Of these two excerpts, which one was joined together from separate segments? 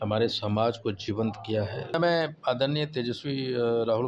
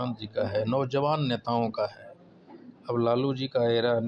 first; 1 cut; at 1.9 s

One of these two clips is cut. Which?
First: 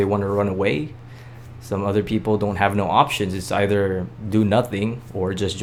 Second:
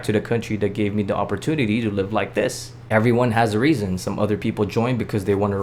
second; 1 cut; at 2.7 s

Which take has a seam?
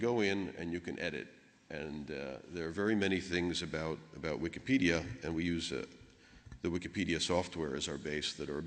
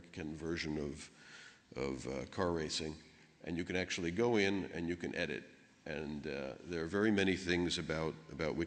first; 1 cut; at 5.6 s

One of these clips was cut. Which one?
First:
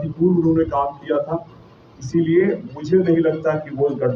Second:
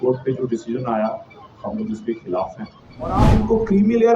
second; 1 cut; at 3.2 s

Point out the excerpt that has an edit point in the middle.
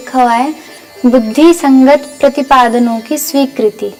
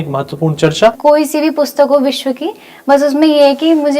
second; 1 cut; at 1.0 s

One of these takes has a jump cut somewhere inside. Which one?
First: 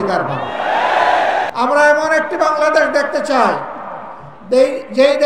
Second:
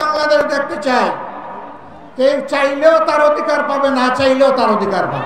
first; 1 cut; at 1.5 s

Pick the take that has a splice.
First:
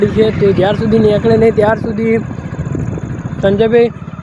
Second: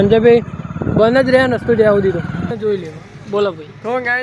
second; 1 cut; at 2.5 s

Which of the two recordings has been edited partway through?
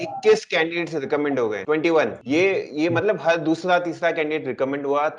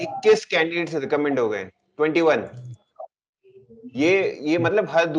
first; 1 cut; at 1.8 s

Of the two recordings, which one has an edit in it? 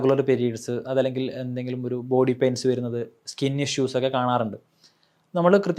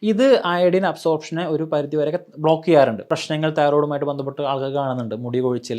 second; 1 cut; at 3.1 s

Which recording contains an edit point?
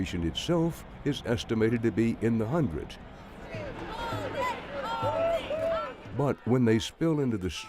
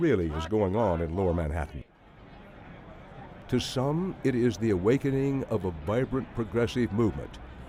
first; 1 cut; at 4.1 s

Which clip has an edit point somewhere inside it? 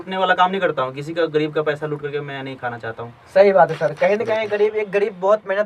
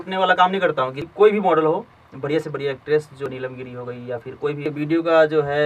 second; 3 cuts; at 1.0 s, 3.2 s, 4.6 s

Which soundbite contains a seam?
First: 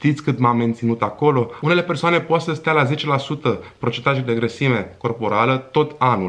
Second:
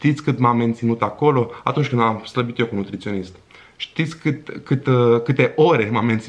first; 1 cut; at 1.6 s

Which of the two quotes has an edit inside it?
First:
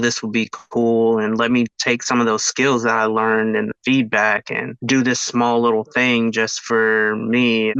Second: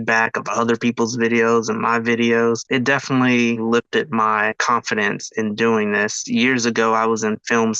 second; 3 cuts; at 2.6 s, 4.5 s, 6.2 s

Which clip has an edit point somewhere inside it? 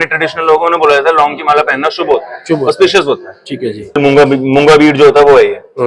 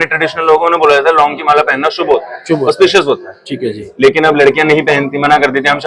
first; 1 cut; at 4.0 s

